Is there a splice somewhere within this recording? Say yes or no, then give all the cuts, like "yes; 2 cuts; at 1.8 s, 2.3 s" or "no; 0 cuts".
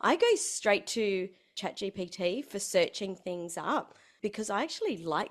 yes; 2 cuts; at 1.6 s, 4.0 s